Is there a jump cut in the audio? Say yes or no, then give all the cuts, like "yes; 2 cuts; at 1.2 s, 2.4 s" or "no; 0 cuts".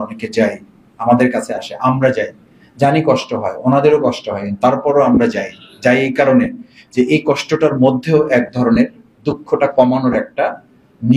no; 0 cuts